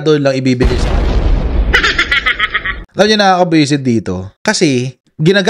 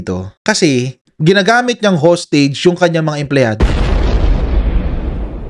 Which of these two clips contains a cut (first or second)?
first